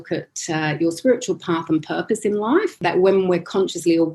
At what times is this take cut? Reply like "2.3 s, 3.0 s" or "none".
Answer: 2.8 s